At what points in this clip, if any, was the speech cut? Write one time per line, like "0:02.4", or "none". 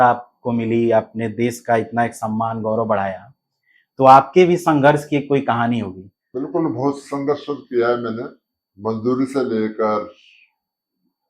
0:06.4